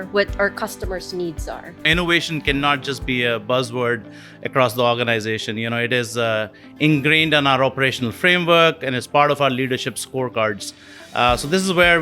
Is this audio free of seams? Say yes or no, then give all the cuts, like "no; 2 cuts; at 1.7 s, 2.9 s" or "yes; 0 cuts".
no; 1 cut; at 1.9 s